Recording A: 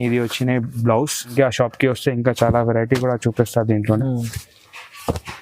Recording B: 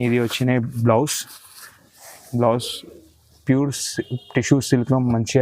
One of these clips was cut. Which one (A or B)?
A